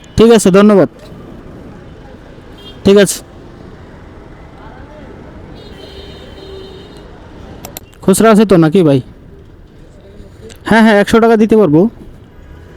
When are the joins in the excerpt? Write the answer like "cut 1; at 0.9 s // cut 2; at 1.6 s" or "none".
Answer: cut 1; at 8.1 s